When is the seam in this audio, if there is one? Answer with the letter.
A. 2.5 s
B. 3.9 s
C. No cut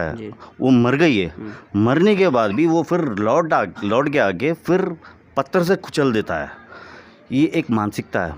C